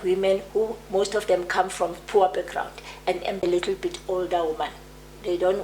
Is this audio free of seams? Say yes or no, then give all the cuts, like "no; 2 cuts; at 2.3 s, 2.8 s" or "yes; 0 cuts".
no; 1 cut; at 3.4 s